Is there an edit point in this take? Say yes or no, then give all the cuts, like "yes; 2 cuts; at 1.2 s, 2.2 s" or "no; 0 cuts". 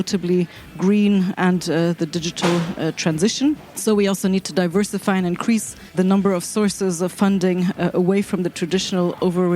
yes; 3 cuts; at 1.4 s, 3.7 s, 6.0 s